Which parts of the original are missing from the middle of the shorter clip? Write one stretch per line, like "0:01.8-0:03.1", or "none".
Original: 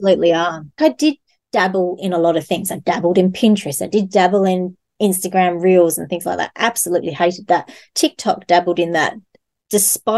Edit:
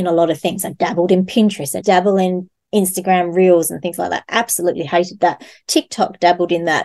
0:03.9-0:04.1